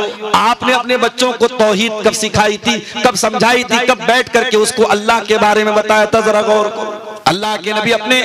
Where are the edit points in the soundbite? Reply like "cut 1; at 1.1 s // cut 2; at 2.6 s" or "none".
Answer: cut 1; at 7.1 s